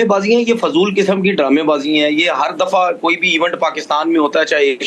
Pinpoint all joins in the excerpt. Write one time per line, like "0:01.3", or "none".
none